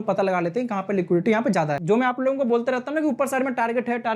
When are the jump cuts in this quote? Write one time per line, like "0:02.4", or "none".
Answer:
0:01.8